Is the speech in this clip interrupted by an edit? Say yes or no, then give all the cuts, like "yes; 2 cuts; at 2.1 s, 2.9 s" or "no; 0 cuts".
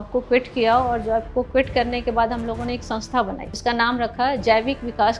no; 0 cuts